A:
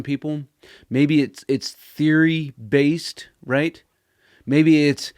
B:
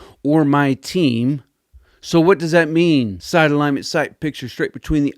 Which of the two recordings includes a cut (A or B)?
B